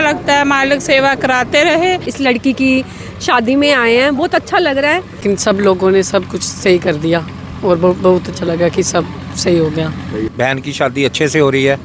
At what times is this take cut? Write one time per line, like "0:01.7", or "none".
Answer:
0:02.1
0:05.2
0:10.3